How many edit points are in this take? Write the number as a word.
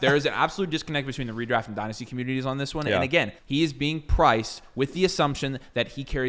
one